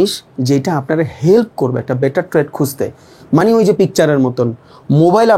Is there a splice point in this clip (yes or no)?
no